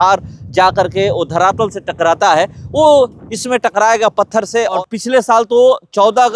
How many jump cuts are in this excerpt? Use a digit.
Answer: 1